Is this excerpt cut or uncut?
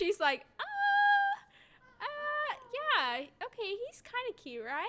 uncut